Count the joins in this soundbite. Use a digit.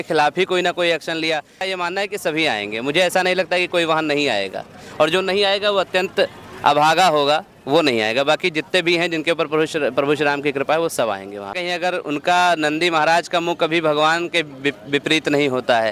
2